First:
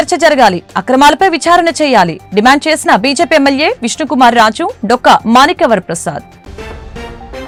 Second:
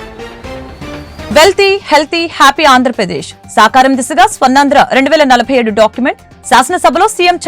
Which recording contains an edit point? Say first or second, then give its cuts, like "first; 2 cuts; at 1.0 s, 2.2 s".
second; 1 cut; at 1.3 s